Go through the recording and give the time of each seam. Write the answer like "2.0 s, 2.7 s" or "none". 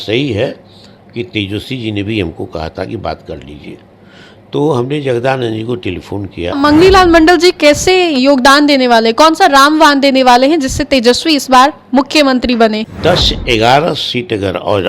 6.5 s, 12.9 s